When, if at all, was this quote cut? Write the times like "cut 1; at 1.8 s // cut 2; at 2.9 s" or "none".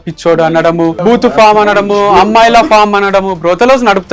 cut 1; at 1.0 s